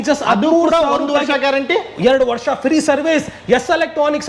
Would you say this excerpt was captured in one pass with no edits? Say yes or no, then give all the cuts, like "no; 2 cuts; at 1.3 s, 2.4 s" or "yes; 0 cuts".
yes; 0 cuts